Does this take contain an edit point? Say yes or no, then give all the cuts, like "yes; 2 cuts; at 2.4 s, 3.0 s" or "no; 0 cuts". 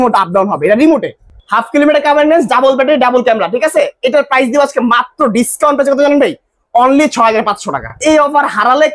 yes; 2 cuts; at 1.3 s, 8.0 s